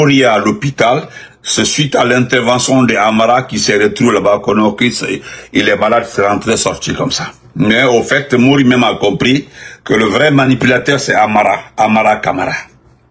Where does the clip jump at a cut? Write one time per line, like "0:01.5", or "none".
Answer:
none